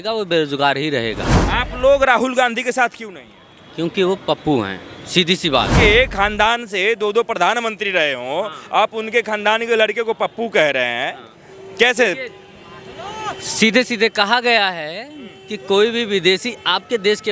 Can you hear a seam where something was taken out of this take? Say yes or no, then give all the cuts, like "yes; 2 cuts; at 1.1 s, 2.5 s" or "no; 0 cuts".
yes; 2 cuts; at 1.3 s, 5.7 s